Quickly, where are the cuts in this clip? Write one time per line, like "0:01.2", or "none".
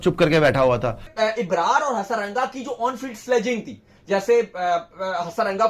0:01.0